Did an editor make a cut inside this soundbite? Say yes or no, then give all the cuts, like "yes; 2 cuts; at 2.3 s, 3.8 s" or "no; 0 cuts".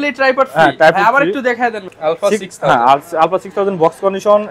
yes; 1 cut; at 1.9 s